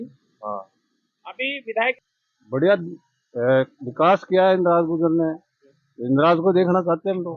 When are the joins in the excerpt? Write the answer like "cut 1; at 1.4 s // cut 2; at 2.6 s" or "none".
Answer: cut 1; at 1.9 s